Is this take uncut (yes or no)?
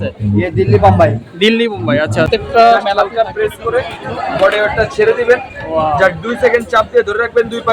no